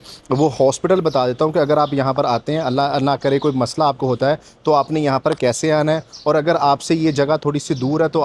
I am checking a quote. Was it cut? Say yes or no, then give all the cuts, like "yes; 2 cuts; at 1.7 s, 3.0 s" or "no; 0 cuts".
no; 0 cuts